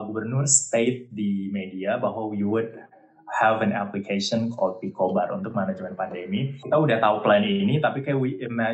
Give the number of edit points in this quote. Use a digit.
1